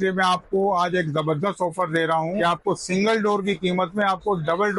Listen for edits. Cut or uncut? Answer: cut